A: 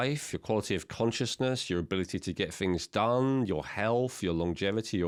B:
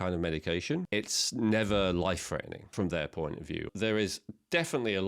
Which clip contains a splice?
B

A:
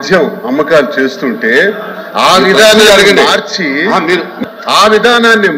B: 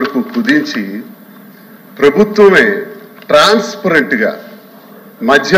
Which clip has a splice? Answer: A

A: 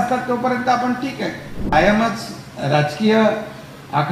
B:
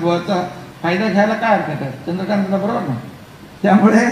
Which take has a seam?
A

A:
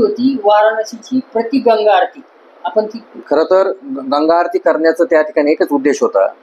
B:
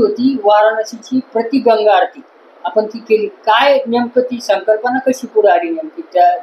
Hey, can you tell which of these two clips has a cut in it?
A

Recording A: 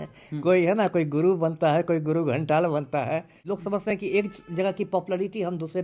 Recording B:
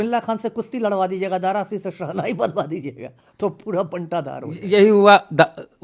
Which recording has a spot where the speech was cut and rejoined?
A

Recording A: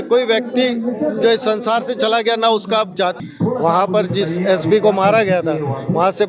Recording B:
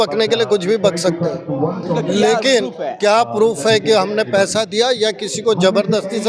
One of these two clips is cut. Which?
A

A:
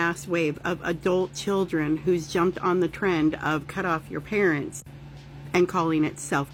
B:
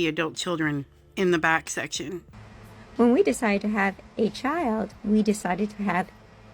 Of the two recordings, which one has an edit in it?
B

